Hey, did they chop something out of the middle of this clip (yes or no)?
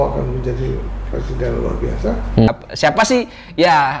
yes